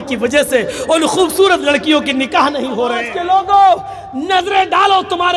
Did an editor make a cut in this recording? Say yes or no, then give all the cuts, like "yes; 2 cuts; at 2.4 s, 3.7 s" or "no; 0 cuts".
yes; 1 cut; at 3.1 s